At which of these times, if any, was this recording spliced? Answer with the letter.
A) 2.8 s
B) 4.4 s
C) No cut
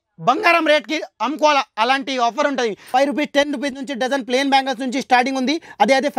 A